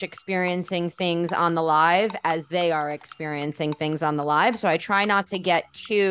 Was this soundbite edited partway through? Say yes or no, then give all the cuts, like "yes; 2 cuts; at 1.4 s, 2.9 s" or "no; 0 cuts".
no; 0 cuts